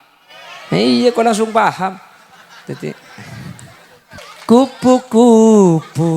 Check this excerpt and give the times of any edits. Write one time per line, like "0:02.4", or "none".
0:04.2